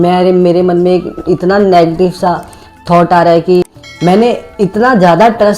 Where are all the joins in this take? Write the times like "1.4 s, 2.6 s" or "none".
3.6 s